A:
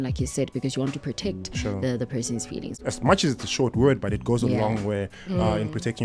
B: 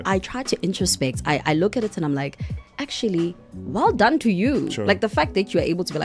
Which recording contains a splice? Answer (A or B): A